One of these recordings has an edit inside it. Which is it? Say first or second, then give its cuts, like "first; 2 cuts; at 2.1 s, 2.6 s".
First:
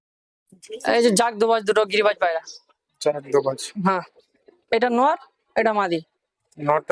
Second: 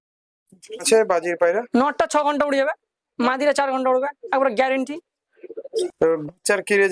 second; 2 cuts; at 0.9 s, 5.9 s